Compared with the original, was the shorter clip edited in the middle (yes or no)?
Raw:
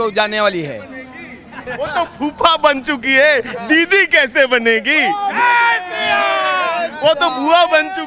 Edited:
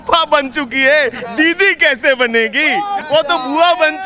yes